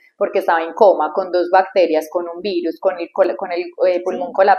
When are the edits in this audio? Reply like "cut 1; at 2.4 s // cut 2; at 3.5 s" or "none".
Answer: none